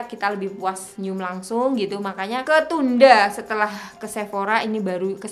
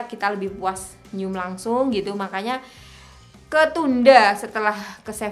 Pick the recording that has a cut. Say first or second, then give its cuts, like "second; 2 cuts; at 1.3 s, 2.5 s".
first; 2 cuts; at 0.9 s, 2.4 s